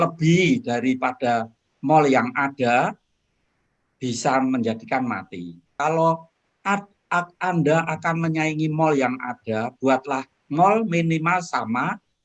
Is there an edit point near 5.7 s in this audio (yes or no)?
yes